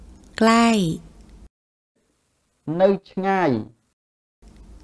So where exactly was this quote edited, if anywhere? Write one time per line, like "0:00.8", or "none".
none